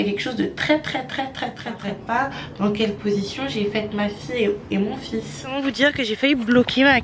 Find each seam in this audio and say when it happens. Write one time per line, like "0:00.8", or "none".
0:01.9
0:05.6